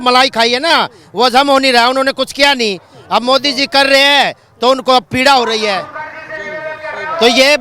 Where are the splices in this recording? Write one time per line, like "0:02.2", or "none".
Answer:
none